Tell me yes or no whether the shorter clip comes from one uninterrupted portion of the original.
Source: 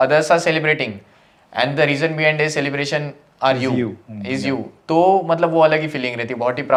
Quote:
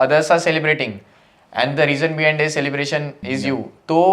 no